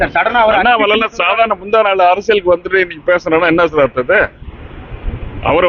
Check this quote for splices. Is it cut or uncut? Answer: uncut